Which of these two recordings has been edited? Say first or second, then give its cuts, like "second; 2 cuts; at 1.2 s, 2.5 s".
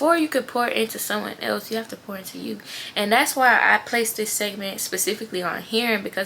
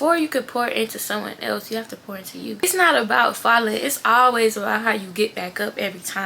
second; 1 cut; at 2.6 s